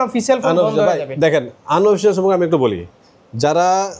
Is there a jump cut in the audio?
no; 0 cuts

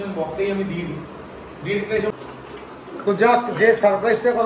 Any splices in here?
yes; 1 cut; at 2.1 s

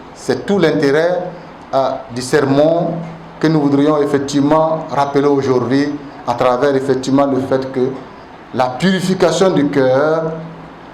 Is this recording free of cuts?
yes; 0 cuts

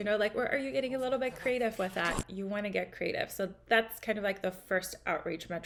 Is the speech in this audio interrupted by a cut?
no; 0 cuts

